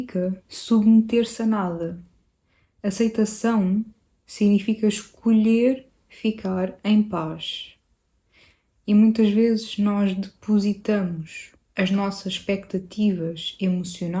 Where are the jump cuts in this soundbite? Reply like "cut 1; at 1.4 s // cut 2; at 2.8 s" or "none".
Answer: none